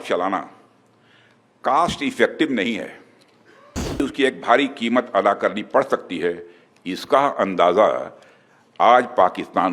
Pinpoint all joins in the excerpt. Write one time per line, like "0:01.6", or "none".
0:04.0